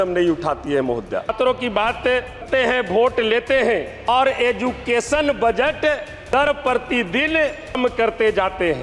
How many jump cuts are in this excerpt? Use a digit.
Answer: 5